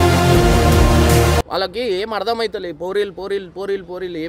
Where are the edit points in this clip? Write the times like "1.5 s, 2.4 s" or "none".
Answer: 1.4 s